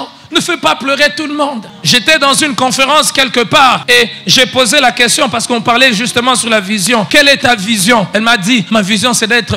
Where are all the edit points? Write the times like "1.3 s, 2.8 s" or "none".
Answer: 1.7 s, 3.8 s, 7.1 s, 8.5 s

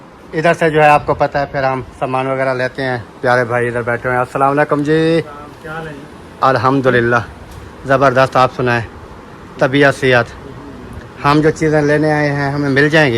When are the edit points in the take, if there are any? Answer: none

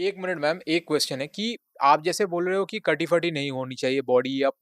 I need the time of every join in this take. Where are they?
none

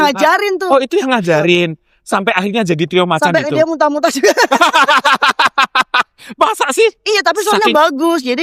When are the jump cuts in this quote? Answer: none

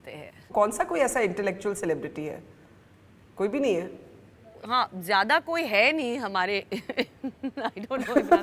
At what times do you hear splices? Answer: none

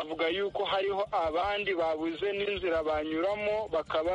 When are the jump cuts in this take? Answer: none

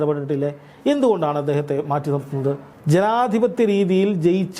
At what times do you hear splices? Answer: 2.7 s

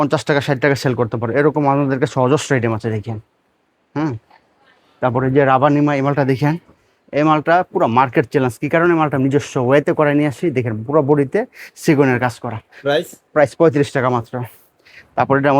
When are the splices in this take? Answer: none

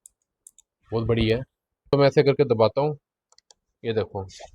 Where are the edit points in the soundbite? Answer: 1.9 s

